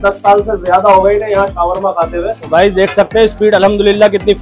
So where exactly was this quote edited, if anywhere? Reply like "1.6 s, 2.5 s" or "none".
2.4 s